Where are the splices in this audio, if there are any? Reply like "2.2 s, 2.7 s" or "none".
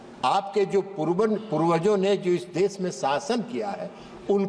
none